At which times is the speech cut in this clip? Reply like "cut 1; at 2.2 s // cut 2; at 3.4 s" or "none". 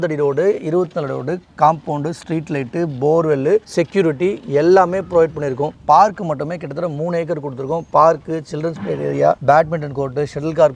none